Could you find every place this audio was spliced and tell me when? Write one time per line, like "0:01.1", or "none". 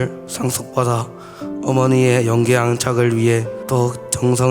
0:03.6